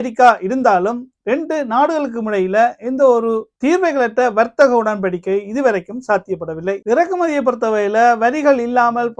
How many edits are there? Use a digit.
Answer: 1